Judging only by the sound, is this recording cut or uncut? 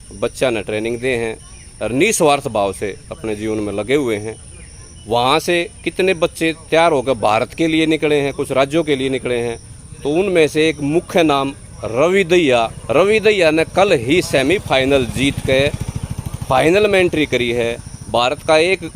cut